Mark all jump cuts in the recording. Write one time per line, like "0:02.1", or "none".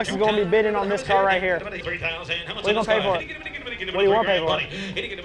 none

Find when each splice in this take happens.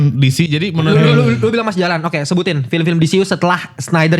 0:01.0

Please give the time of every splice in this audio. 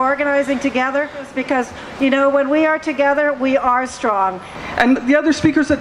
0:01.3
0:04.5

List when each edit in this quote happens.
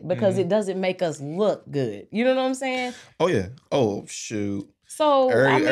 none

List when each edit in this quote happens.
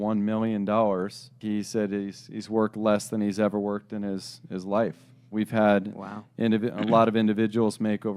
0:01.4
0:05.3

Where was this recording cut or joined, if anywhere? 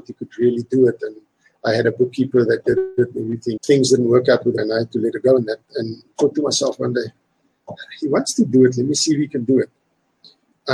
0:03.6
0:04.6

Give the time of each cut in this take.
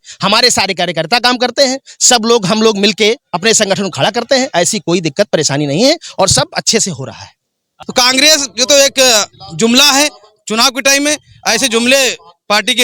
0:07.8

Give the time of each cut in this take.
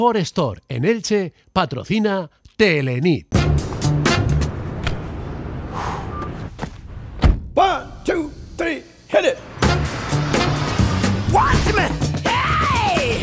0:03.2

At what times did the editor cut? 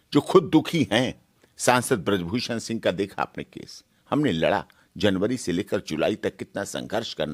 none

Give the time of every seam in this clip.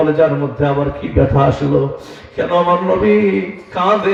none

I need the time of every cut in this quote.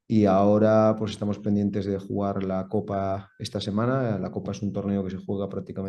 none

